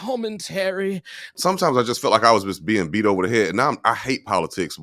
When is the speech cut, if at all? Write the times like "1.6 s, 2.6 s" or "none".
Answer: 1.3 s